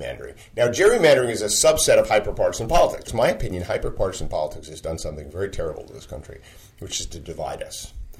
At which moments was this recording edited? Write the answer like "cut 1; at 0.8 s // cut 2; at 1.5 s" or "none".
cut 1; at 3.1 s